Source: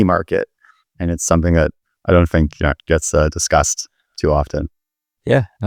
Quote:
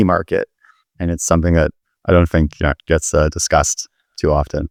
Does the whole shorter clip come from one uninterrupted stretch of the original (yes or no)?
yes